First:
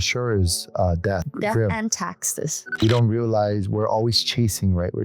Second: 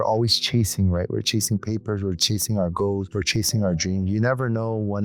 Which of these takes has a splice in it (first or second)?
first